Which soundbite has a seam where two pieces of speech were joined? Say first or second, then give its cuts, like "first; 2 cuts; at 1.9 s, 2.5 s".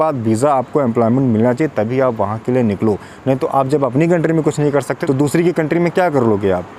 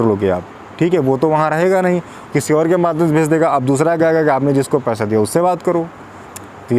first; 1 cut; at 4.9 s